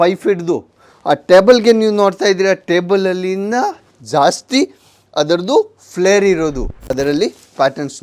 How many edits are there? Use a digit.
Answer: 1